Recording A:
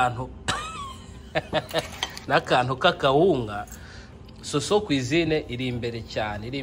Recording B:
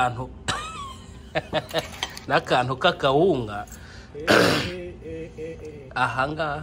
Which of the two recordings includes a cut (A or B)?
A